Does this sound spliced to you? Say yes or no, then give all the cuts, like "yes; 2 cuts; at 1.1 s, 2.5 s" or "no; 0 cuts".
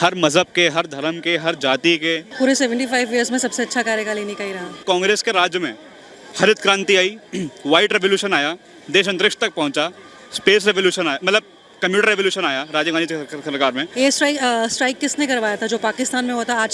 yes; 3 cuts; at 2.3 s, 4.8 s, 13.9 s